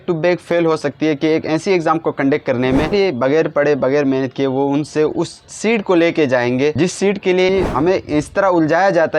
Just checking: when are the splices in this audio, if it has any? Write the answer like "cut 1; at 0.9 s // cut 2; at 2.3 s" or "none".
cut 1; at 2.9 s // cut 2; at 7.5 s